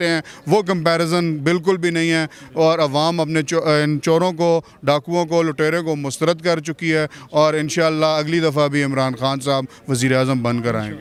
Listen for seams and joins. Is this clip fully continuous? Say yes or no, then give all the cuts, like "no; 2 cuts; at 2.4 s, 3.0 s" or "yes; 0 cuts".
yes; 0 cuts